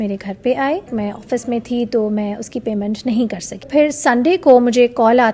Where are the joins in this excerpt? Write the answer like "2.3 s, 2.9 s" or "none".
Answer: 0.9 s, 3.6 s